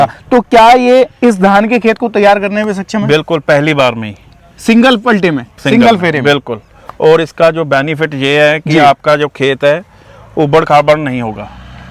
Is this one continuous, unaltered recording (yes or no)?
yes